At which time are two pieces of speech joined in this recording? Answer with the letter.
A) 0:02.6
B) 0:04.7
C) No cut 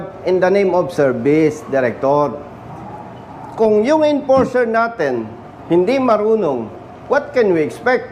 C